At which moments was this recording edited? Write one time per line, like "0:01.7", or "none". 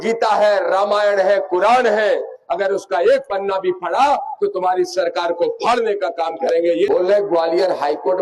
0:06.9